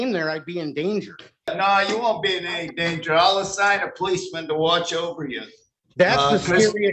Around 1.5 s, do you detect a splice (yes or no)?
yes